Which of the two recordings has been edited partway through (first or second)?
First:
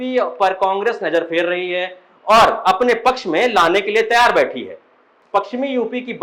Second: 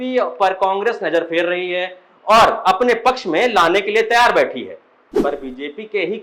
second